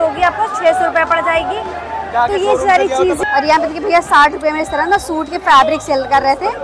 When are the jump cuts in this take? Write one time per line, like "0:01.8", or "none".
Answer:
0:03.2